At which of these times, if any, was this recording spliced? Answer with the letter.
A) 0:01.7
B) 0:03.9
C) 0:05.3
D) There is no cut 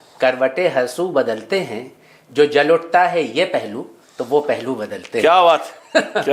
D